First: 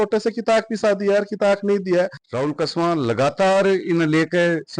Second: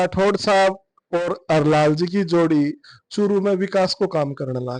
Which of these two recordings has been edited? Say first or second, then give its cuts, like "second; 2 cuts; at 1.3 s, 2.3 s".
first; 1 cut; at 2.2 s